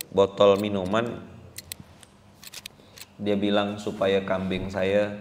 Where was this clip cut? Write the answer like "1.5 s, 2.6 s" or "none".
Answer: none